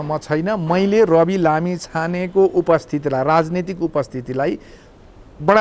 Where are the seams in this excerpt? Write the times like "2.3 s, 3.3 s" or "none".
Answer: none